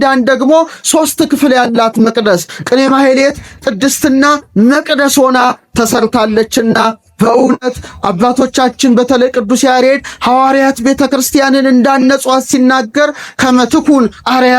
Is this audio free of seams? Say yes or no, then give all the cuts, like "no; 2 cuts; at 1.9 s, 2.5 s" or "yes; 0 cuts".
yes; 0 cuts